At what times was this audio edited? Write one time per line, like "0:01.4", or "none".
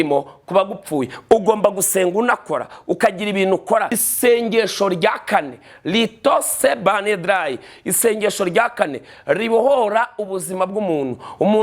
0:04.0